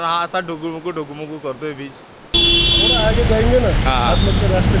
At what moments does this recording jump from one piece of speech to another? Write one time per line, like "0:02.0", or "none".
0:02.2